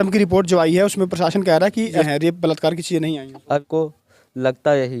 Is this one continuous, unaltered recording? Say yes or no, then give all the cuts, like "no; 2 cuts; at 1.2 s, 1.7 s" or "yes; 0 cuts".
no; 2 cuts; at 2.1 s, 3.6 s